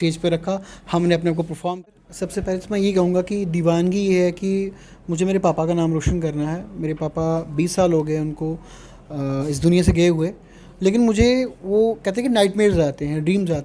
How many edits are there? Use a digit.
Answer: 1